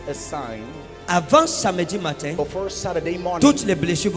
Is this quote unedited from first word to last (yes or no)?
yes